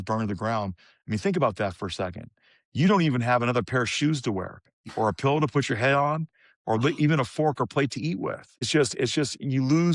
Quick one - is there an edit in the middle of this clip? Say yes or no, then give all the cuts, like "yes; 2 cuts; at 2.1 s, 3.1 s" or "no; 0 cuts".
yes; 1 cut; at 8.7 s